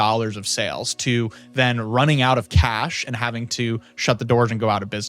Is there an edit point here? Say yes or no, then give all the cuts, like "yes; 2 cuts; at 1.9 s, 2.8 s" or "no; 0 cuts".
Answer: no; 0 cuts